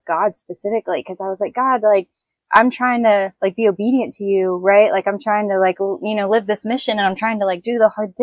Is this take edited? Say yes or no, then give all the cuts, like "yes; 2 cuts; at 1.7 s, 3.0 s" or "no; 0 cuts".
yes; 1 cut; at 2.3 s